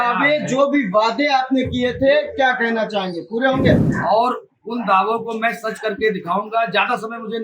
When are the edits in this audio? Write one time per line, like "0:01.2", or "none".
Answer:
0:03.9